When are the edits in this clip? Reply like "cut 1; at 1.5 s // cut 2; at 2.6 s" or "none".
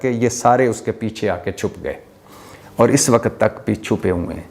none